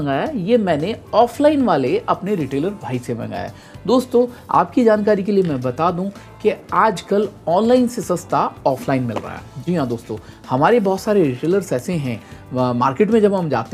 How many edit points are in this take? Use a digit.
0